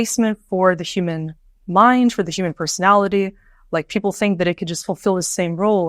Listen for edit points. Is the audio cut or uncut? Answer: uncut